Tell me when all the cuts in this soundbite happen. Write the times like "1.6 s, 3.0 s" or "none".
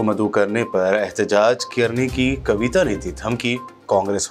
none